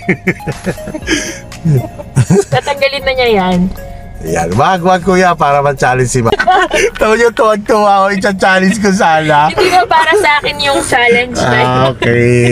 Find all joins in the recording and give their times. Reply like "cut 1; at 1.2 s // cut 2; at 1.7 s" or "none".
none